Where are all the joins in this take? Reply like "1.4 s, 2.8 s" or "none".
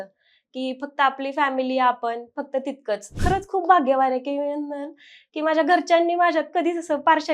3.1 s